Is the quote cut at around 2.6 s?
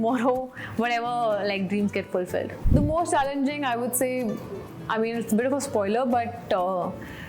yes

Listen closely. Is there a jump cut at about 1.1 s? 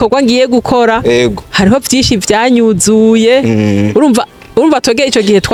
no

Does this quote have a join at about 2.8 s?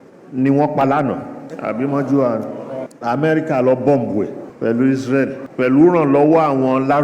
yes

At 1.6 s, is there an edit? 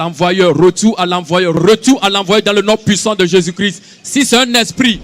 yes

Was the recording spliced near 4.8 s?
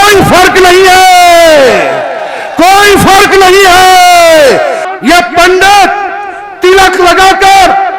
yes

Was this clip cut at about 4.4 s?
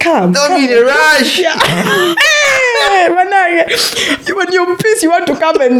no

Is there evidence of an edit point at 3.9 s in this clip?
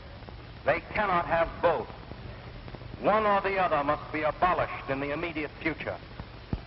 no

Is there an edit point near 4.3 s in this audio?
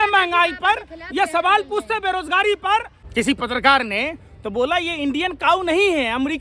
no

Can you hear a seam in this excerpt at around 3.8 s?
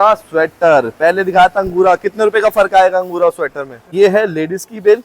yes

